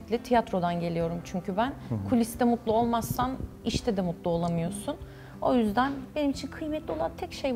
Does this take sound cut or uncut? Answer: uncut